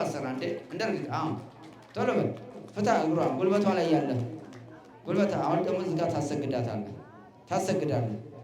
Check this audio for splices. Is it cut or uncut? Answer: uncut